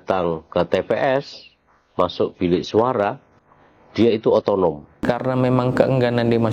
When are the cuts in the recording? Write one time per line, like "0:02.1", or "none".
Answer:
0:05.1